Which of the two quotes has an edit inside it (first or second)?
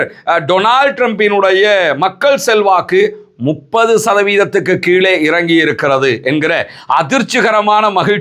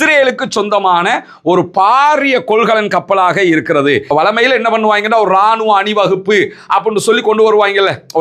second